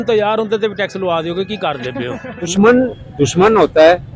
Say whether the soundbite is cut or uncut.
cut